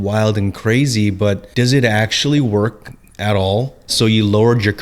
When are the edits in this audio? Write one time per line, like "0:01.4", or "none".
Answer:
0:01.5
0:03.9